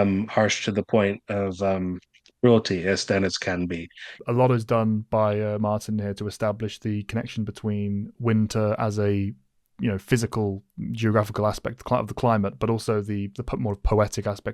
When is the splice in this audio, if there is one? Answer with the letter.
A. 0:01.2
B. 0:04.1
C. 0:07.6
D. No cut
B